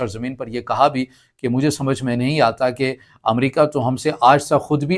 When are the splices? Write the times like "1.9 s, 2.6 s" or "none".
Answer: none